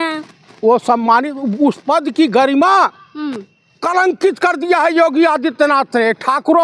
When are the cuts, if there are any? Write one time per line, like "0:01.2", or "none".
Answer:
none